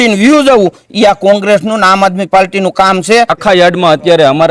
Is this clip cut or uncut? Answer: cut